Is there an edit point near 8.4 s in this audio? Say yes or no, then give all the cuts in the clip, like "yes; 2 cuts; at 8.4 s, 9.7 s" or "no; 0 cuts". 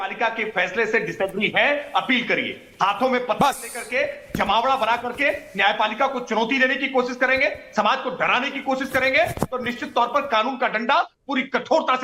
no; 0 cuts